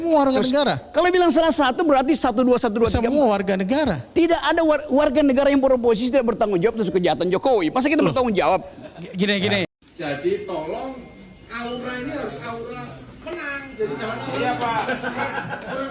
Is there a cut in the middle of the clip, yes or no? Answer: yes